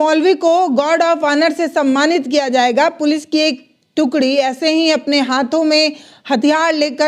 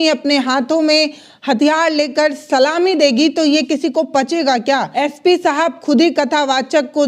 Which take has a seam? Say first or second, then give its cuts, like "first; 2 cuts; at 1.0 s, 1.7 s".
second; 1 cut; at 4.9 s